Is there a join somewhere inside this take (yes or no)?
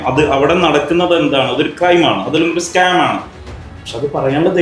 no